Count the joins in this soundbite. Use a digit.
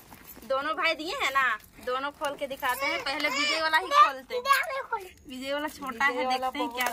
1